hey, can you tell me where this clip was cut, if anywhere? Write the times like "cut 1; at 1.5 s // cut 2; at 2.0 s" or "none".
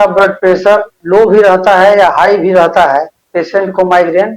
cut 1; at 1.0 s // cut 2; at 3.2 s